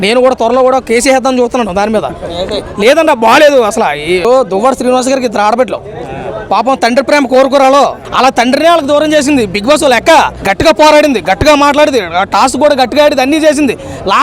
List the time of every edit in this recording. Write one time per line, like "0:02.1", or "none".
0:04.2
0:08.0
0:10.4